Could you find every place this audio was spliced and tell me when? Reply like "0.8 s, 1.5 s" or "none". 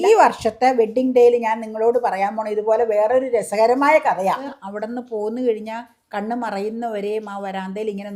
4.4 s